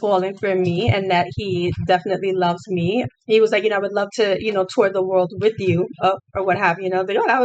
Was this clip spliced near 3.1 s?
yes; 1 cut; at 3.1 s

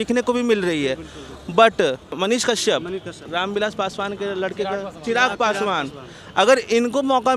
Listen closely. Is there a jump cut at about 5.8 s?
no; 2 cuts; at 2.1 s, 3.3 s

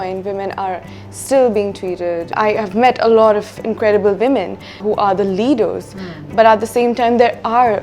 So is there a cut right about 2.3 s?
yes; 2 cuts; at 2.3 s, 4.8 s

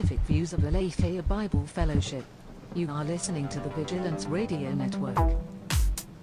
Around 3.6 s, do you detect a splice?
no; 1 cut; at 5.1 s

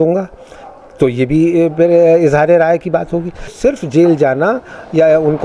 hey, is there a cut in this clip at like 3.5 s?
yes; 1 cut; at 3.5 s

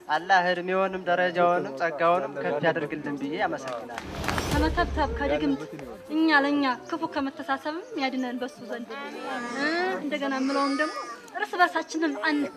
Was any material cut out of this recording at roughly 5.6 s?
no; 1 cut; at 4.3 s

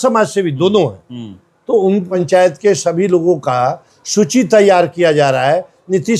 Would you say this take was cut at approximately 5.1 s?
no; 1 cut; at 2.2 s

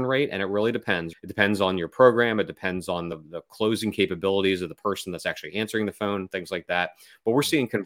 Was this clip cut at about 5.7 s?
no; 2 cuts; at 1.1 s, 3.2 s

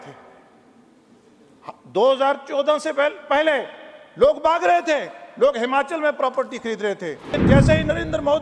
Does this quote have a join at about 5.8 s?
no; 1 cut; at 7.4 s

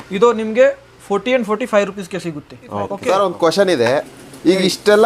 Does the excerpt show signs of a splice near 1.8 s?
no; 1 cut; at 3.3 s

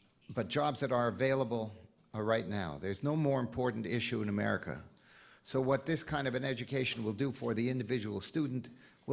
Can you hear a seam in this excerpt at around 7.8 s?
no; 1 cut; at 2.8 s

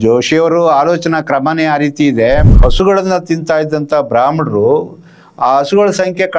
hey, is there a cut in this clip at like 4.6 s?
no; 1 cut; at 2.5 s

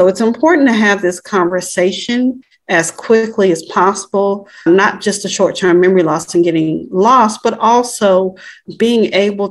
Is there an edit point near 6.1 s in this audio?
no; 3 cuts; at 2.5 s, 4.6 s, 8.6 s

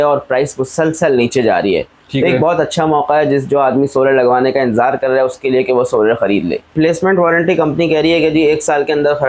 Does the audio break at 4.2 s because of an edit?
no; 1 cut; at 6.7 s

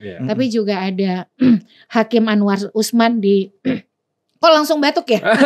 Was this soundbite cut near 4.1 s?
no; 0 cuts

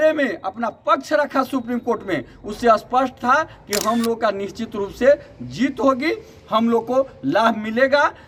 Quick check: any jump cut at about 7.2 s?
no; 0 cuts

